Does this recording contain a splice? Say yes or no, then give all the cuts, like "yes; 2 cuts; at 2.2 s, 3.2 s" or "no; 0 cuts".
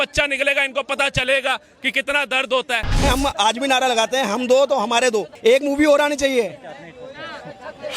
yes; 2 cuts; at 3.0 s, 5.3 s